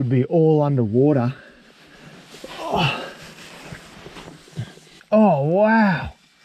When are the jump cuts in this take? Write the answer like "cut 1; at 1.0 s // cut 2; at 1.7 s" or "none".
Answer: cut 1; at 4.9 s